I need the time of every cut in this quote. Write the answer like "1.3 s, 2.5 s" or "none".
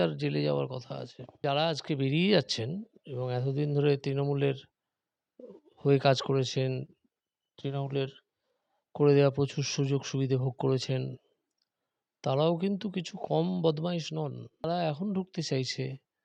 1.4 s, 14.6 s